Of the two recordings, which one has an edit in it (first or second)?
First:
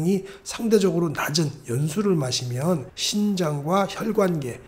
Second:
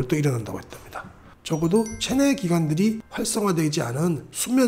second